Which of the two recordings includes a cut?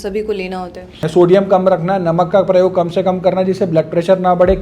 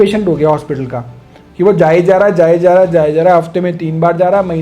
first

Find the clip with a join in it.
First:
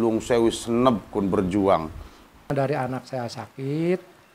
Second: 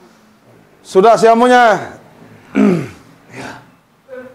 first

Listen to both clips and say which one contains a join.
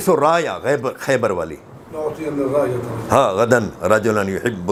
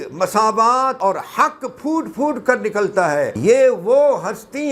second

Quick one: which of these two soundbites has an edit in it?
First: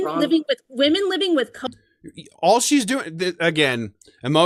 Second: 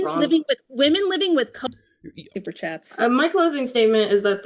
second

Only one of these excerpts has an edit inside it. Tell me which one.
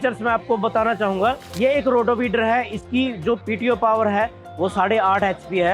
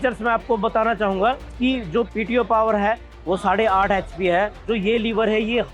second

